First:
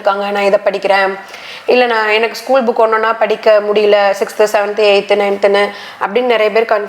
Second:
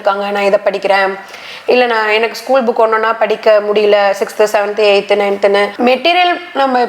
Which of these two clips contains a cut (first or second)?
second